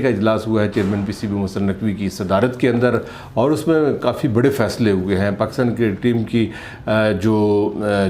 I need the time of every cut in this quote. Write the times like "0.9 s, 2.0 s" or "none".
none